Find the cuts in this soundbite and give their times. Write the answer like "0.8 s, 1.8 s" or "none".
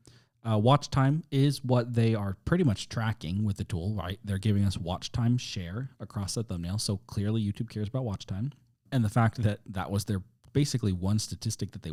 none